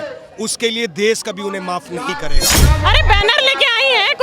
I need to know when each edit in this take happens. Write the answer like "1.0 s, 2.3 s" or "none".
2.6 s